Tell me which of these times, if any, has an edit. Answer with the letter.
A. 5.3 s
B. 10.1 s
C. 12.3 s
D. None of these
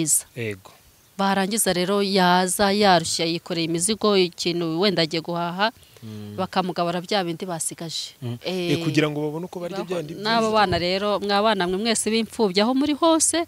B